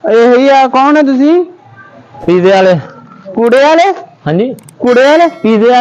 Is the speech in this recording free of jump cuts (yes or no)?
yes